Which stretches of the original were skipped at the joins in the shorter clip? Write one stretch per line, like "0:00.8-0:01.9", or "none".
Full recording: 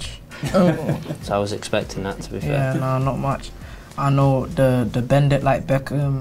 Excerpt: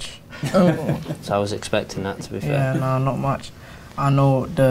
none